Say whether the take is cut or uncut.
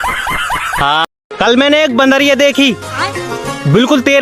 cut